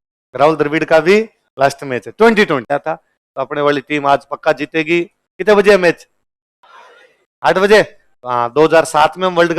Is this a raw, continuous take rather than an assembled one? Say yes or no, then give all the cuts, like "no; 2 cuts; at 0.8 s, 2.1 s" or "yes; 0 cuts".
no; 1 cut; at 2.6 s